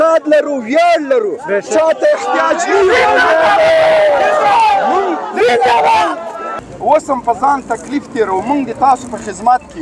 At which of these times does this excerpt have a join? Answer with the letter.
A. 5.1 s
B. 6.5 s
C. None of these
B